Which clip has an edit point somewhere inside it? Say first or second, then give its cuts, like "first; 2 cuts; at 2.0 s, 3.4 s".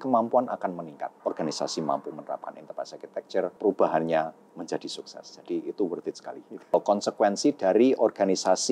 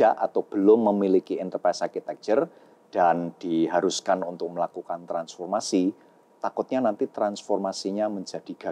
first; 3 cuts; at 1.2 s, 3.5 s, 6.7 s